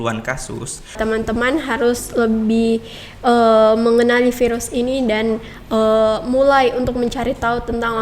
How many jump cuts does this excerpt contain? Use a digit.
1